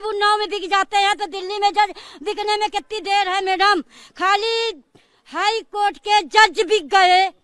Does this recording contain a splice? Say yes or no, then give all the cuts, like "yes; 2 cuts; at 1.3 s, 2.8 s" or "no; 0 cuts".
no; 0 cuts